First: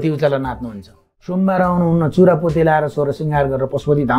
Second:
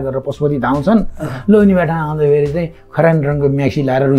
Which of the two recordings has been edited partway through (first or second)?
first